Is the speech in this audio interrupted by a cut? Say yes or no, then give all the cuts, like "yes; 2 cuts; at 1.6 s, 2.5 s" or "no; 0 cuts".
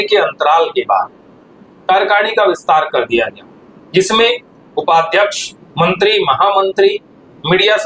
no; 0 cuts